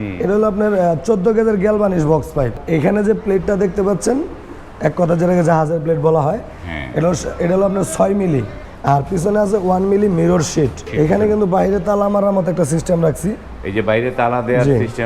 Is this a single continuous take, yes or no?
no